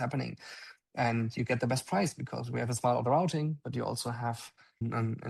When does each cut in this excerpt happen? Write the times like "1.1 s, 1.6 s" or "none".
none